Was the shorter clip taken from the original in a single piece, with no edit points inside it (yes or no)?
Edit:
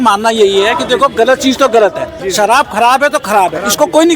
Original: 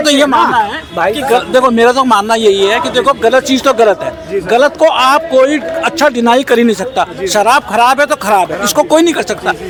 no